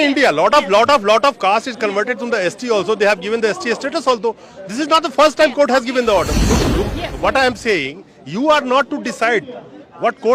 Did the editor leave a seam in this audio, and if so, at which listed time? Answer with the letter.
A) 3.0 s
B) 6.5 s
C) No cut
B